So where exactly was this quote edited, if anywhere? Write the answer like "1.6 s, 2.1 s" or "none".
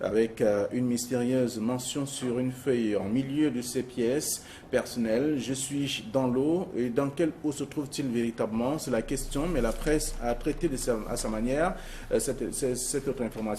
9.1 s